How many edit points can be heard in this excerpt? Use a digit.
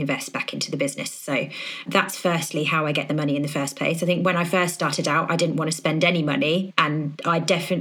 1